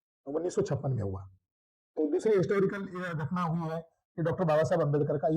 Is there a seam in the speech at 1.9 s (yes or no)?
no